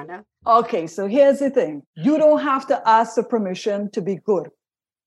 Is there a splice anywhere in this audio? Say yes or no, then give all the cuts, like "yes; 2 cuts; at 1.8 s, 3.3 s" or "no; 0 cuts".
yes; 1 cut; at 1.8 s